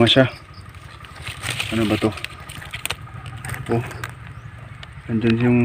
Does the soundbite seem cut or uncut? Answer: uncut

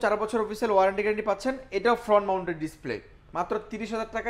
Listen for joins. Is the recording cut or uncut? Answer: uncut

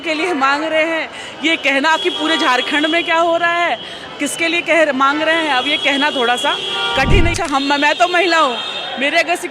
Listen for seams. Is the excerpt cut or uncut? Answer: cut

